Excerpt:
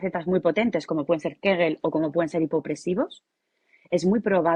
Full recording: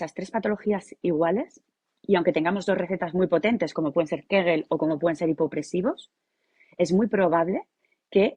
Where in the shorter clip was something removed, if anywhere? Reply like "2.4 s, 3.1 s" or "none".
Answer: none

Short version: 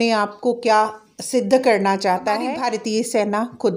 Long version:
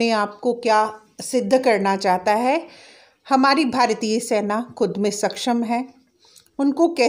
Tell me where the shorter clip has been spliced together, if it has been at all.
2.5 s

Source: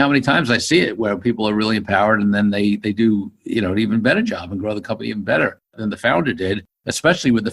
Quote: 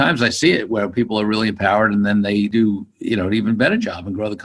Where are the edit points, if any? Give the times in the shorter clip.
2.5 s

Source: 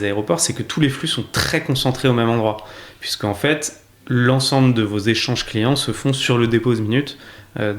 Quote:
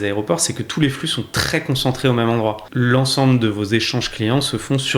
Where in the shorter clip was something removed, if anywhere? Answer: 2.6 s

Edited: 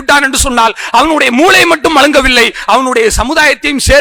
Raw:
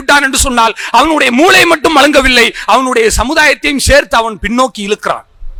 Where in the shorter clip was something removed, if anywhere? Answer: none

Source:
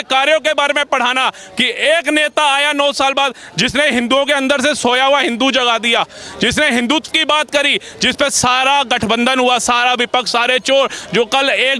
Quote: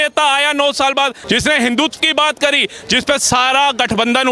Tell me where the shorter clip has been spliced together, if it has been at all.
1.2 s

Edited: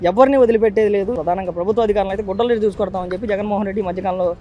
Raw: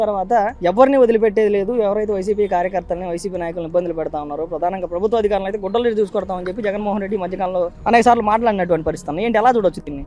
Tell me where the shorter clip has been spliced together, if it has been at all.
1.1 s

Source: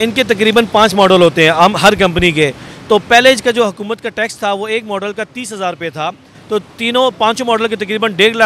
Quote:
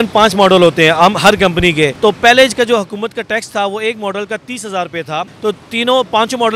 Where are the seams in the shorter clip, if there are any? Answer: 1.9 s, 5.3 s

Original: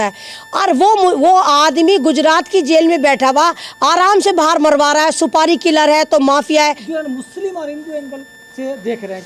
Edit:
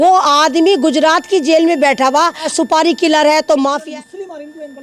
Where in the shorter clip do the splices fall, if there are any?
2.5 s

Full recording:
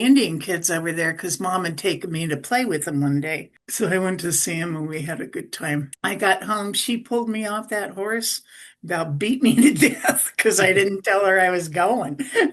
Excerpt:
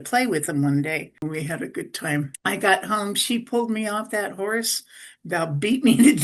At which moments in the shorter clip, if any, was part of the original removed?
1.2 s

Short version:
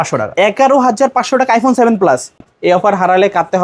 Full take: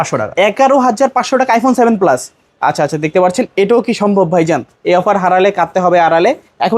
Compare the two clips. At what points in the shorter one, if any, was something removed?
2.5 s

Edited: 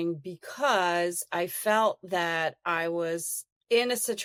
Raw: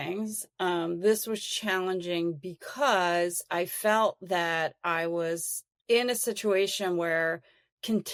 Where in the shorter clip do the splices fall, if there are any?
none

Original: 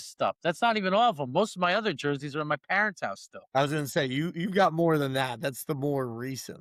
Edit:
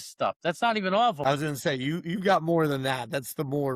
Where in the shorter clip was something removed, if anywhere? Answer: 1.2 s

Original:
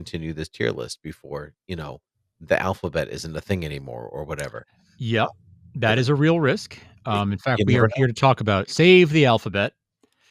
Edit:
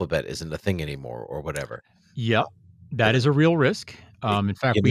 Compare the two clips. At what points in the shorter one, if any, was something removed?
none

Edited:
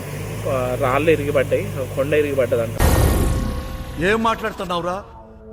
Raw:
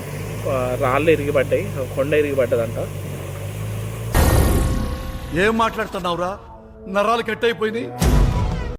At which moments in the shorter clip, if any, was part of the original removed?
2.7 s

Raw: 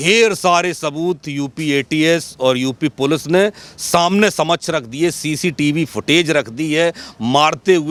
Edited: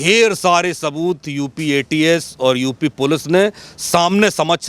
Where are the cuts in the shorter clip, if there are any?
none

